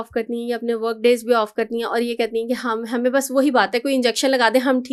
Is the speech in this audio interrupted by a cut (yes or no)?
no